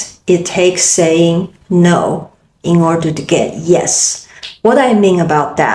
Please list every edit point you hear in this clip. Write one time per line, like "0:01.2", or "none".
none